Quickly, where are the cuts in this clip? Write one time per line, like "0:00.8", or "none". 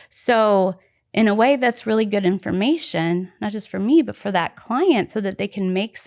none